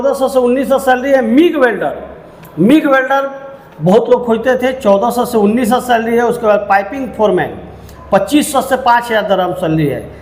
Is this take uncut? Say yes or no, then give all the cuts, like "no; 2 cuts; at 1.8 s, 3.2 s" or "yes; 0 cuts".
yes; 0 cuts